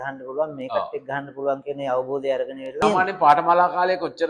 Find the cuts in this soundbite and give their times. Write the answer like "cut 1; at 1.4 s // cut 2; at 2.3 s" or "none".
cut 1; at 2.8 s